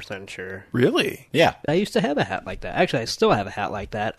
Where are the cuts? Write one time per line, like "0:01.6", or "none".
0:01.6

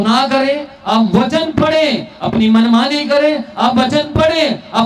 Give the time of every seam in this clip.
none

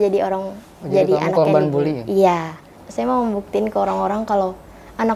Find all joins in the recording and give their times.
0:02.7

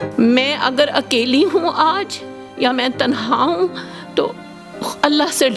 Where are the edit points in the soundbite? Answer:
none

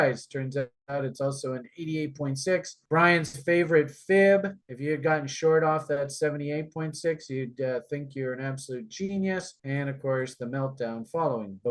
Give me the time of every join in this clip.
none

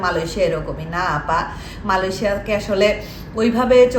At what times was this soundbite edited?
none

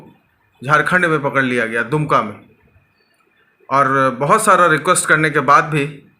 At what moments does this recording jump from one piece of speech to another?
none

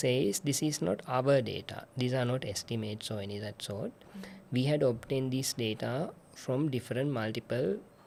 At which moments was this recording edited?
none

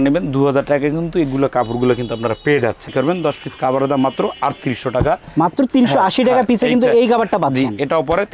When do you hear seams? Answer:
0:02.9

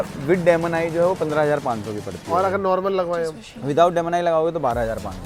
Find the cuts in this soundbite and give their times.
none

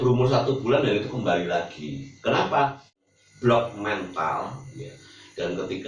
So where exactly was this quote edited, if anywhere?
0:03.1

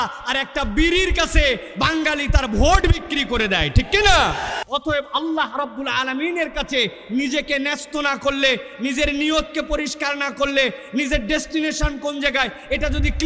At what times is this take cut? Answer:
0:04.6

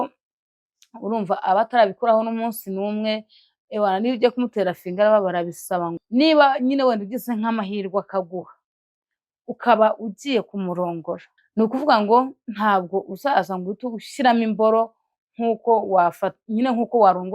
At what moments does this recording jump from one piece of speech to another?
0:06.0
0:11.3

